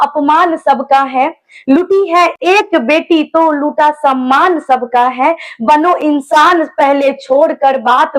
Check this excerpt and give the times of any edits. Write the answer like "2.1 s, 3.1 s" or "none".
none